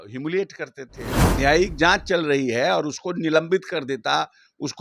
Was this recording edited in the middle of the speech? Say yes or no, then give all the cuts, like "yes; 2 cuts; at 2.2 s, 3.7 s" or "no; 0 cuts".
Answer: yes; 1 cut; at 1.2 s